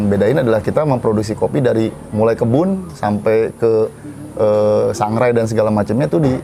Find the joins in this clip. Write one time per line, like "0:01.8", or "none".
none